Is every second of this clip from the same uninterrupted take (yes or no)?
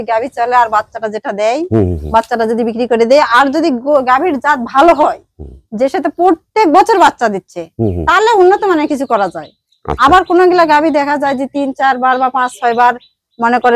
yes